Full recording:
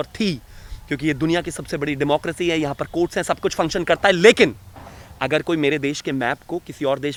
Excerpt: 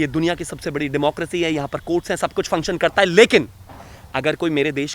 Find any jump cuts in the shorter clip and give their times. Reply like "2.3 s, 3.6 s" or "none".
none